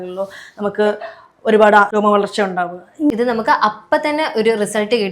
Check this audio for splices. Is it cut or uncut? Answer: cut